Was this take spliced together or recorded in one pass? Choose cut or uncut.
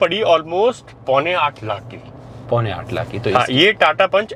uncut